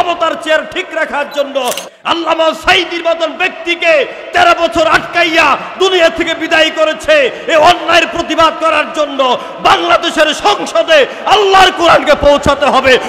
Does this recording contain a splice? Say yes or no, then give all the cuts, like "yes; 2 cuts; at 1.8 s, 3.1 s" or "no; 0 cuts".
yes; 1 cut; at 1.8 s